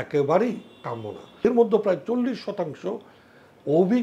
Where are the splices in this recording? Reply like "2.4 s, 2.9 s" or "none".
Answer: 1.4 s